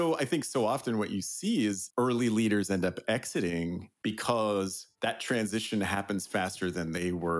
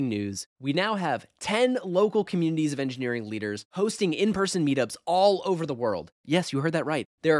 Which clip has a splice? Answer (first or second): first